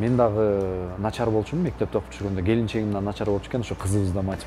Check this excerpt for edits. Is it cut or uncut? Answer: uncut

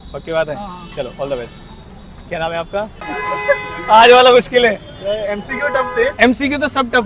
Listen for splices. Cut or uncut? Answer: cut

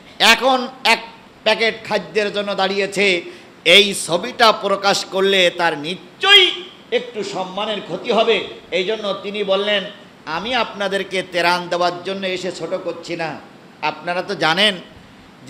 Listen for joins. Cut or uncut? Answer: uncut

